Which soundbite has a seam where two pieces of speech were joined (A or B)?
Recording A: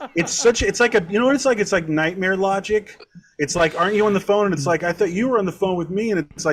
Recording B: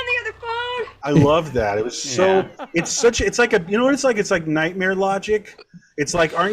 B